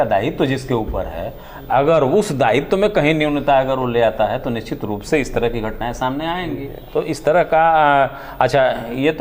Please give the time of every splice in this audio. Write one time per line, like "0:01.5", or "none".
none